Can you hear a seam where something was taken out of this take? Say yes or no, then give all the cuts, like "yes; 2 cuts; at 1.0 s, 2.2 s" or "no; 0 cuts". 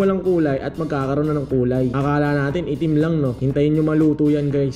no; 0 cuts